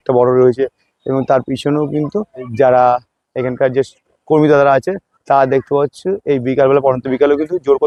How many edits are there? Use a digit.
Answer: 0